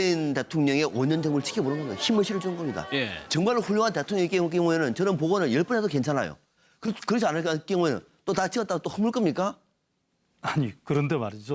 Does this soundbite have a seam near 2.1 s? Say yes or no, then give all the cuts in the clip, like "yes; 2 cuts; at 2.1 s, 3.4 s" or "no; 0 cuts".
yes; 1 cut; at 2.1 s